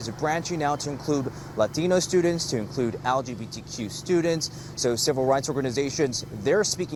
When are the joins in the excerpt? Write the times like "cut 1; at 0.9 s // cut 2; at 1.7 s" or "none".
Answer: none